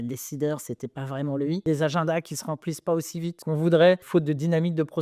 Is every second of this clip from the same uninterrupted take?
no; 3 cuts; at 1.6 s, 3.4 s, 4.0 s

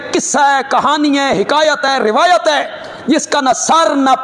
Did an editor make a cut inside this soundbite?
no; 0 cuts

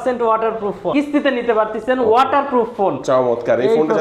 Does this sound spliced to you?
yes; 1 cut; at 0.9 s

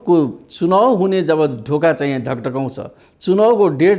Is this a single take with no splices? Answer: yes; 0 cuts

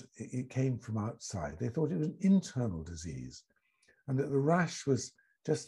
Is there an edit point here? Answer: no; 0 cuts

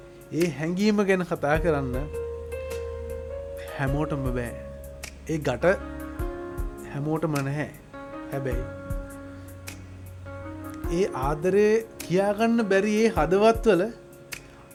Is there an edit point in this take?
no; 0 cuts

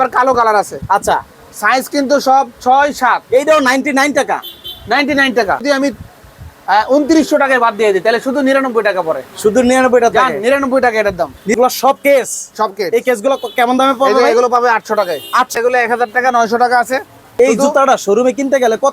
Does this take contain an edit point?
yes; 4 cuts; at 5.6 s, 11.5 s, 15.5 s, 17.4 s

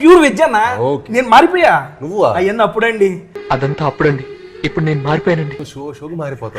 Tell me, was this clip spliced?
no; 0 cuts

